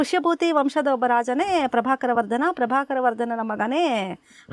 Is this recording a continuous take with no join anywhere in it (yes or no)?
yes